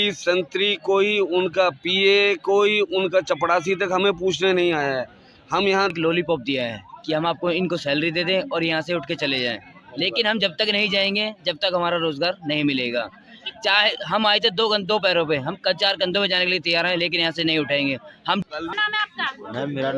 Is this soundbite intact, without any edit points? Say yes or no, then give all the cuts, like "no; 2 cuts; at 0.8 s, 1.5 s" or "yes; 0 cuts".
no; 2 cuts; at 5.9 s, 18.4 s